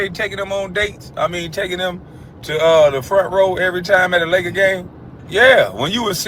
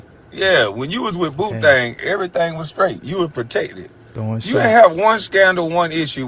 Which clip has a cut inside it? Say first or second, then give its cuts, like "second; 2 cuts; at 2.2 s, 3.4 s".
first; 1 cut; at 4.9 s